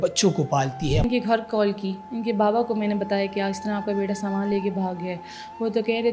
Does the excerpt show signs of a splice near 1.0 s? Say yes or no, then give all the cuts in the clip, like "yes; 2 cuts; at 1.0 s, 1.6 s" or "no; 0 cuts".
yes; 1 cut; at 1.0 s